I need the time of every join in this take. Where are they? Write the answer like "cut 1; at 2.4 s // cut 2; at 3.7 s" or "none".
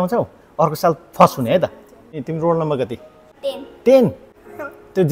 cut 1; at 2.2 s // cut 2; at 3.2 s